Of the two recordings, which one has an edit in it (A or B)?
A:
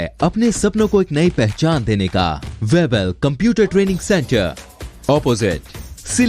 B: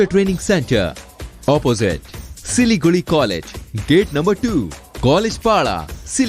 A